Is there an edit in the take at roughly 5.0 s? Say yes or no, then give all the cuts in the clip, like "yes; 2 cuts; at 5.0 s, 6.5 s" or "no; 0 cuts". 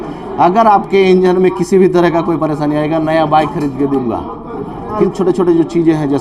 yes; 1 cut; at 5.0 s